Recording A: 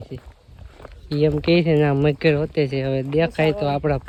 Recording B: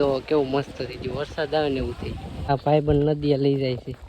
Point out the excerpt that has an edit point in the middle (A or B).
B